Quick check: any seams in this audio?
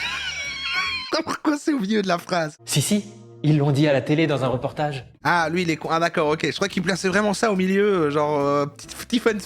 yes; 1 cut; at 2.6 s

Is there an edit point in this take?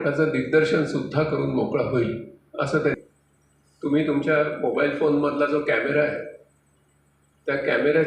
yes; 1 cut; at 2.9 s

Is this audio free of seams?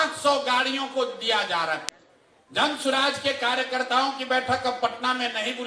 no; 1 cut; at 1.8 s

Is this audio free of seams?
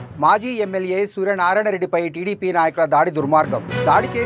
yes; 0 cuts

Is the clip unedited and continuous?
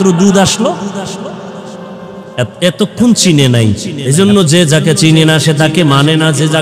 no; 1 cut; at 3.9 s

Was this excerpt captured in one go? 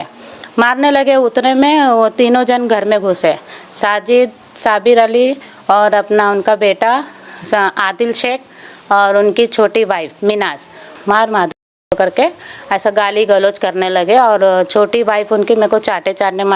no; 1 cut; at 10.9 s

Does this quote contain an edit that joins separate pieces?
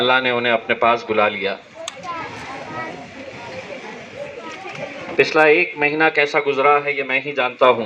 no; 0 cuts

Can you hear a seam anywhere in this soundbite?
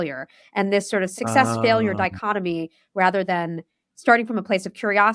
yes; 1 cut; at 1.1 s

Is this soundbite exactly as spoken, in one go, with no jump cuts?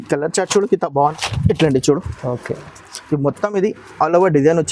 no; 1 cut; at 1.1 s

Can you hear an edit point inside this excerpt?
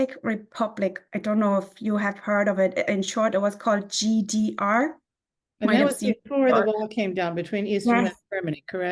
no; 0 cuts

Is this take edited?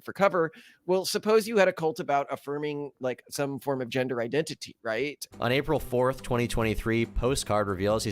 yes; 1 cut; at 5.2 s

